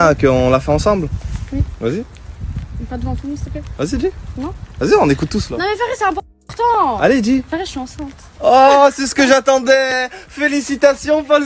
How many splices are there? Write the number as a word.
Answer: zero